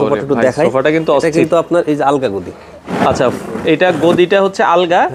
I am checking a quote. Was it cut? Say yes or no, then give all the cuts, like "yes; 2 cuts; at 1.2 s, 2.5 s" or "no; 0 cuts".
no; 0 cuts